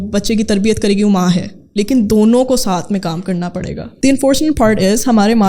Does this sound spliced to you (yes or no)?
yes